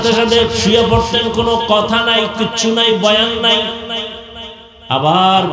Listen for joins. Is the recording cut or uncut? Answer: uncut